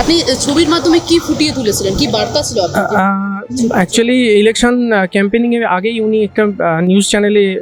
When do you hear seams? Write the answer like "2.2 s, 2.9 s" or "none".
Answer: none